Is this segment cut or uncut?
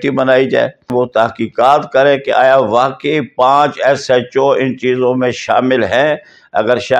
cut